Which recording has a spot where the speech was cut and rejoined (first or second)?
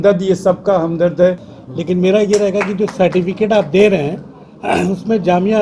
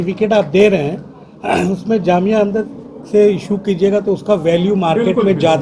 first